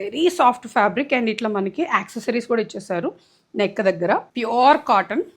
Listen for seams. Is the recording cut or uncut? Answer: cut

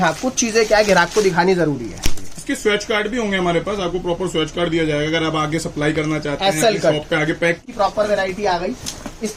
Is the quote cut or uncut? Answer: cut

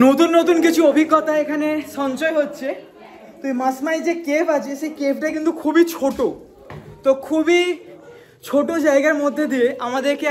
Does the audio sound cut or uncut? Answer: uncut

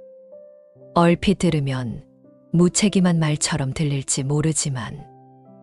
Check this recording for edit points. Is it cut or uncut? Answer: uncut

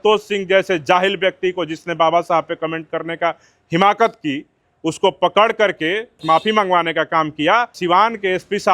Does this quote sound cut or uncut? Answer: cut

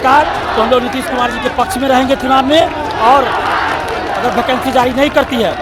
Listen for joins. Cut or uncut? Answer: uncut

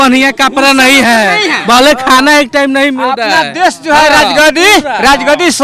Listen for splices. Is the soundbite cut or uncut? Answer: uncut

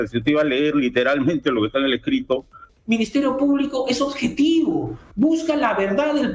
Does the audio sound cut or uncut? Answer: cut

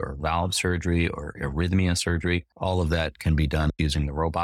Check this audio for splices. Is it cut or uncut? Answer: cut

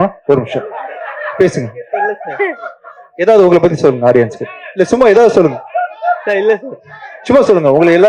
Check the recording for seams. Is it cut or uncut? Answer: uncut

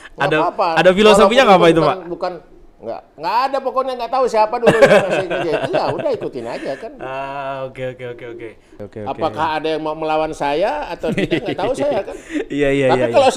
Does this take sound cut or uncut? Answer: cut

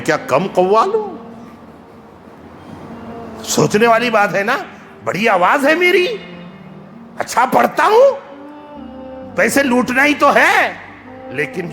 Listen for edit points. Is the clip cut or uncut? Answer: uncut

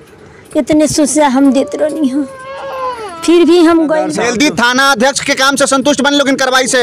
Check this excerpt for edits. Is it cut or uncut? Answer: cut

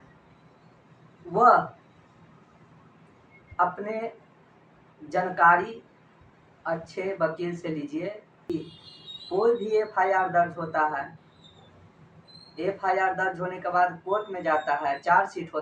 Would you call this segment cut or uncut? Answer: cut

